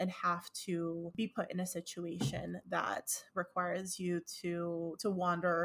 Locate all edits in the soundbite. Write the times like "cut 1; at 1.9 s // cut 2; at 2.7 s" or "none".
none